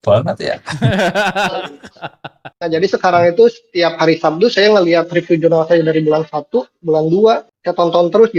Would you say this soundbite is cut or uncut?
cut